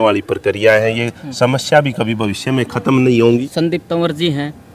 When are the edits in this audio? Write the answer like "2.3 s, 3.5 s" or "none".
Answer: 3.3 s